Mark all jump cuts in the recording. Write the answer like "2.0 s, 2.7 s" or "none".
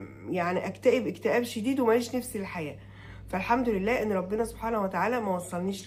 none